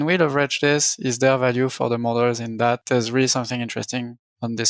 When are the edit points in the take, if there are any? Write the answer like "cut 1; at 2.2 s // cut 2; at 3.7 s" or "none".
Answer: cut 1; at 2.8 s

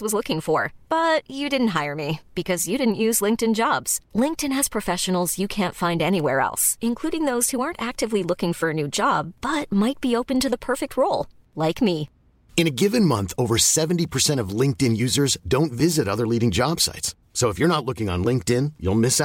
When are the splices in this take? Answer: none

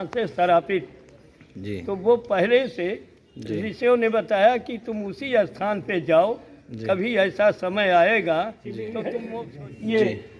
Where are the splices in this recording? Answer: cut 1; at 9.2 s

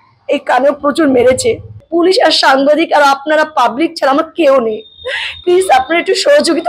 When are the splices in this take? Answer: cut 1; at 1.8 s

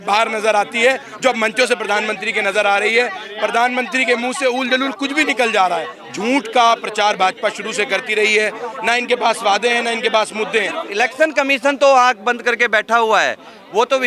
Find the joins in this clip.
cut 1; at 6.0 s // cut 2; at 10.8 s

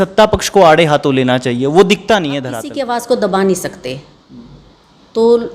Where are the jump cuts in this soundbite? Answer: cut 1; at 2.6 s

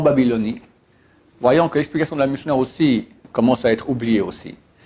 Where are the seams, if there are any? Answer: cut 1; at 3.2 s

